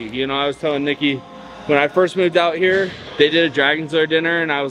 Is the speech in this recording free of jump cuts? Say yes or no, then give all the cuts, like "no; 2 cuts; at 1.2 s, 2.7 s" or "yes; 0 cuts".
yes; 0 cuts